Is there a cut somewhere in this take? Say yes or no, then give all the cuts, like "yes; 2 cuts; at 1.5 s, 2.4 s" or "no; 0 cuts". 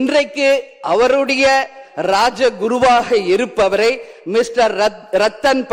no; 0 cuts